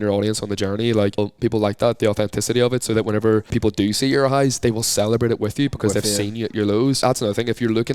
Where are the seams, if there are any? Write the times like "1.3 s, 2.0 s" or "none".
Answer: 1.2 s, 3.5 s, 7.0 s